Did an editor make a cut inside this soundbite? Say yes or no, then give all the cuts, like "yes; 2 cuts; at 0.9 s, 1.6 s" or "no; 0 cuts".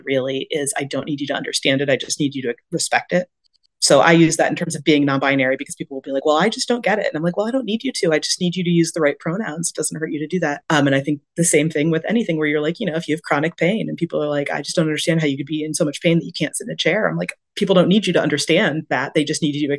no; 0 cuts